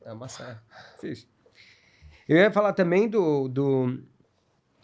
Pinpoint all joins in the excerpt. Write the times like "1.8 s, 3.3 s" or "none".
none